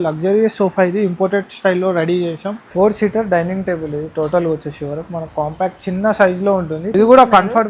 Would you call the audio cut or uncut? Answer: cut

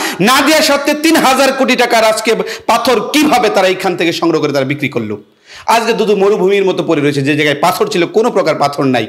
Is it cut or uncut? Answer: uncut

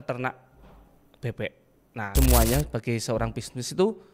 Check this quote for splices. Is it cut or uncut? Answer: cut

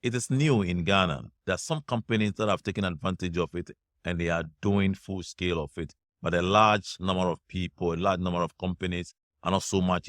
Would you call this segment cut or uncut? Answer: cut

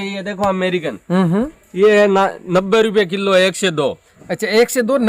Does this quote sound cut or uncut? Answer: uncut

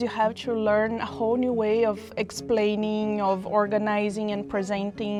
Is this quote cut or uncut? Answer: uncut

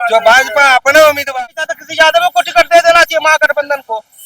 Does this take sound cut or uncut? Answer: cut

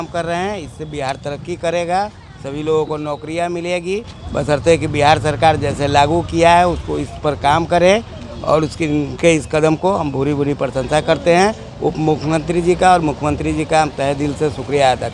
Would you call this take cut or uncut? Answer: uncut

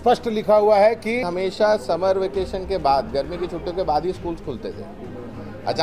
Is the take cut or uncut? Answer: cut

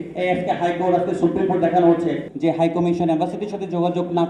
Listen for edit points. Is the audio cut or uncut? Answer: cut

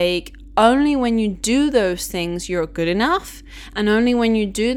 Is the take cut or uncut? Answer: uncut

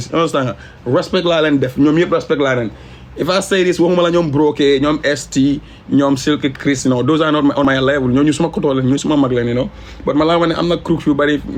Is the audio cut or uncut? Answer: uncut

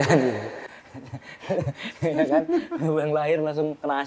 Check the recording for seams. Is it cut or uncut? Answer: uncut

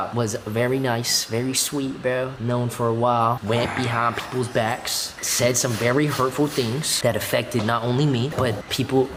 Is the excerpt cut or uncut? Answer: uncut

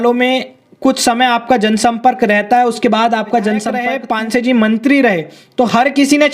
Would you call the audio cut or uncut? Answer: cut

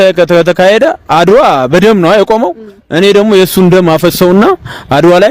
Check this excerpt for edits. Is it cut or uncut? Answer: uncut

